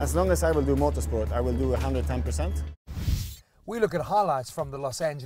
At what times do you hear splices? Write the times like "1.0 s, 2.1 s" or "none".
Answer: 3.2 s